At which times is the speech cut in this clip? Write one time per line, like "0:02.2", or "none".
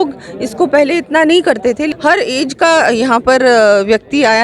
0:01.9